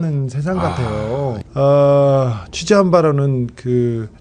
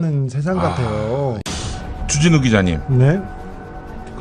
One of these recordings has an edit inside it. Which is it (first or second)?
second